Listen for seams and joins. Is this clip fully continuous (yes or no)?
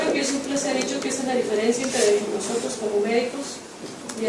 no